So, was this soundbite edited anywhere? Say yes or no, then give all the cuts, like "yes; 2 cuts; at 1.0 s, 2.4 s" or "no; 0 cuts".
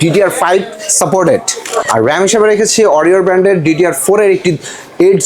yes; 1 cut; at 1.8 s